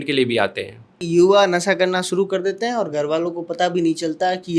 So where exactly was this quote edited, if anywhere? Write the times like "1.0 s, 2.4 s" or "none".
0.9 s